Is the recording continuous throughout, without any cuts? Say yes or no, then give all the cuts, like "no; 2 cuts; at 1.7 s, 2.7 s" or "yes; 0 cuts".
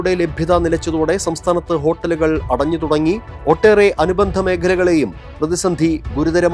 yes; 0 cuts